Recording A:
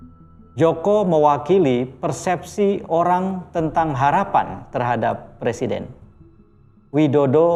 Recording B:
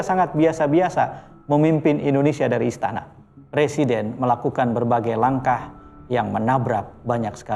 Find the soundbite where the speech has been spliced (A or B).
B